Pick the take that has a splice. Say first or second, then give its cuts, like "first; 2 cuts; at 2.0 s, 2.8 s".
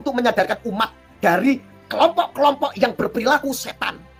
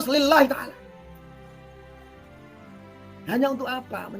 second; 2 cuts; at 0.7 s, 3.3 s